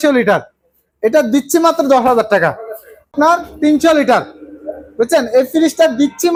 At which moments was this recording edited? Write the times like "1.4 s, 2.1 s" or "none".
none